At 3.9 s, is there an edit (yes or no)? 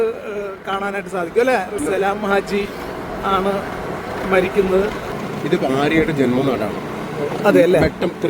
no